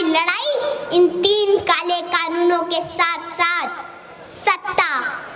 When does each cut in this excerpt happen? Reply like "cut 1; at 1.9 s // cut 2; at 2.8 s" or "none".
none